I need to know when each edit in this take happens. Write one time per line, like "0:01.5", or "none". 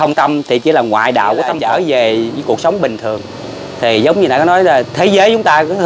0:01.6

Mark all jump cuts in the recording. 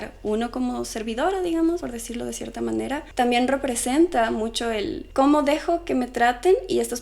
0:01.8
0:03.1
0:05.0

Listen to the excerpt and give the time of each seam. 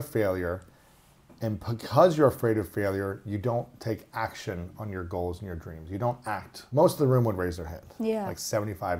0:06.6

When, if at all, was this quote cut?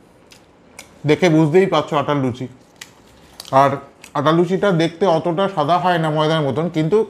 none

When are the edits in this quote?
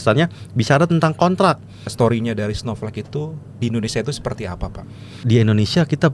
0:01.9
0:05.2

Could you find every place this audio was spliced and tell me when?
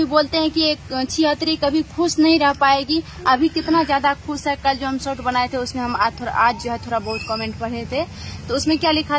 none

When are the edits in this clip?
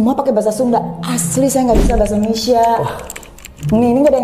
none

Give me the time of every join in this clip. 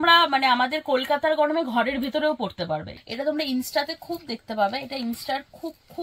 0:03.0

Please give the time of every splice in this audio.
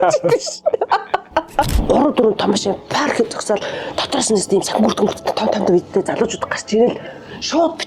0:01.7

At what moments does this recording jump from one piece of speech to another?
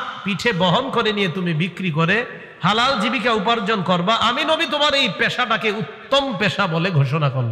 none

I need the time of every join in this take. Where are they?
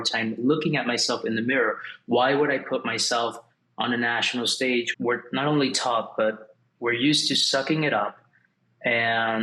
0:04.9

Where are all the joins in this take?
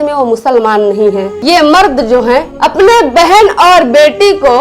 0:01.3

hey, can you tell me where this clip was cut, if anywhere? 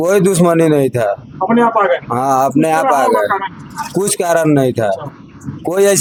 none

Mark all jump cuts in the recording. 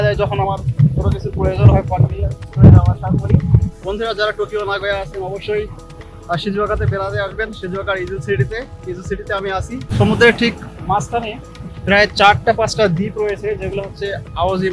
0:03.7
0:09.9

